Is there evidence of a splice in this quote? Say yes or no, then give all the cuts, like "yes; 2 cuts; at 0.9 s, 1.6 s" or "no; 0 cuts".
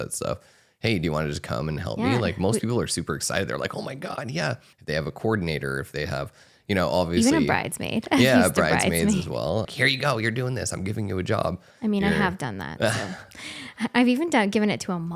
yes; 2 cuts; at 4.7 s, 9.7 s